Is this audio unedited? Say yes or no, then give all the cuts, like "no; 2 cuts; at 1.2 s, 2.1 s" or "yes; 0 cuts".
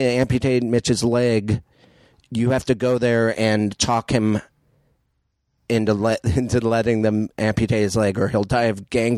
yes; 0 cuts